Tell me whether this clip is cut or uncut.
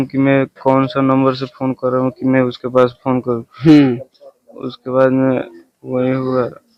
uncut